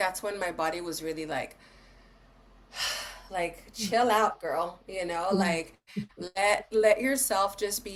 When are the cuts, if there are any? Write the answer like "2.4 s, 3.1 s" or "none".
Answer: none

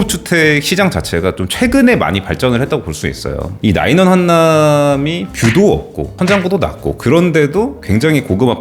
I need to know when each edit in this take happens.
3.5 s, 6.1 s

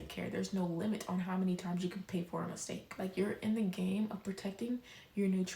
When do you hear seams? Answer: 3.1 s

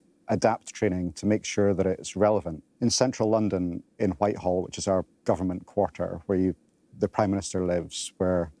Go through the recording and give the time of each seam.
2.6 s

